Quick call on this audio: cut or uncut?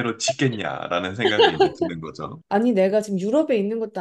cut